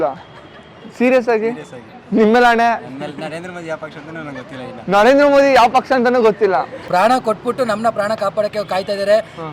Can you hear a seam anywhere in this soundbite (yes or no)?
yes